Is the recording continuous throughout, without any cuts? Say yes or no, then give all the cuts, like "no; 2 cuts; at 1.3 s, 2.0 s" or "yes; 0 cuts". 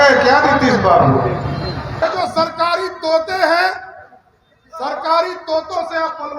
no; 2 cuts; at 1.9 s, 3.3 s